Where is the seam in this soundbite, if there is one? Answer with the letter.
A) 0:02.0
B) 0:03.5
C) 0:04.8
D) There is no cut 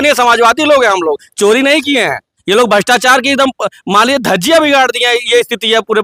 D